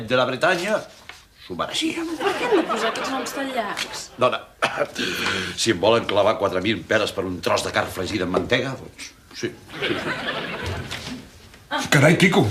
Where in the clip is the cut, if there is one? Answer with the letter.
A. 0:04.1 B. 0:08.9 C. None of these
A